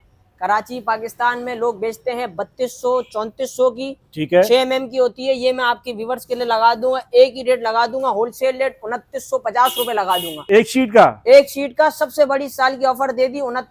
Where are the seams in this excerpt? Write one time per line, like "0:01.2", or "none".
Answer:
none